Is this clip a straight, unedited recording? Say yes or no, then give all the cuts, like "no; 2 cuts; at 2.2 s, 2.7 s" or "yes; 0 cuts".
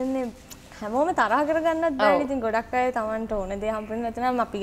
yes; 0 cuts